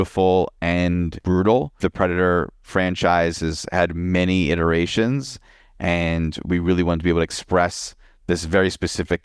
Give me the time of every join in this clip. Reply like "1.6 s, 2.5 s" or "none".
1.2 s, 1.7 s

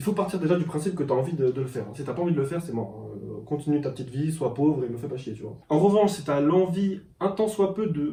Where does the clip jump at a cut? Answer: none

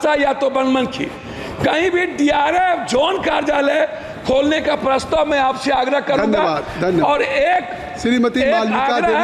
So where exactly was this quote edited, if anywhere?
none

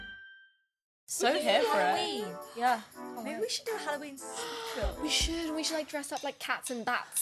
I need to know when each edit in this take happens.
1.0 s

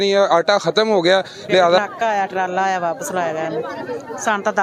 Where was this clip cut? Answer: 1.8 s

